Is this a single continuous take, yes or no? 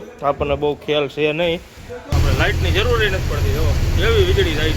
no